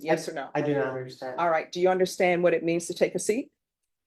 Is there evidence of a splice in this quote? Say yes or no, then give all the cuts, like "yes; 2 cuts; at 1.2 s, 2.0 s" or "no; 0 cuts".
no; 0 cuts